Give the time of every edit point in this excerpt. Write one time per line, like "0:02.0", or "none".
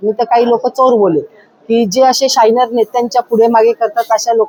none